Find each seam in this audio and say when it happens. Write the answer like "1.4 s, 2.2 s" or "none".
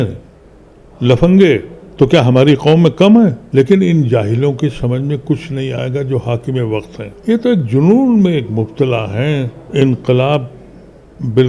1.8 s, 3.4 s, 7.0 s, 9.6 s